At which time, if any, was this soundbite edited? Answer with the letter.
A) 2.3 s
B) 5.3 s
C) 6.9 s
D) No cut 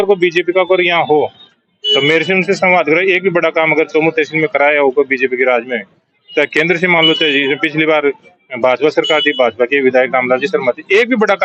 D